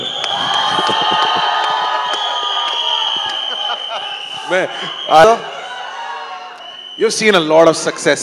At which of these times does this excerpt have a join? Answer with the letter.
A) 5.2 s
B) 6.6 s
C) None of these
A